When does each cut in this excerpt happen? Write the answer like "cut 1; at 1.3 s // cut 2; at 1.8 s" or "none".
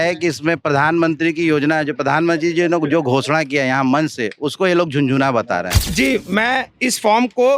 cut 1; at 5.8 s